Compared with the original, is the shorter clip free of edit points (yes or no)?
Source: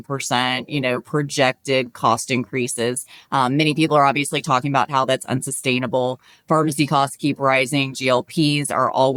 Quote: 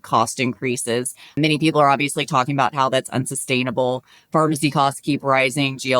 no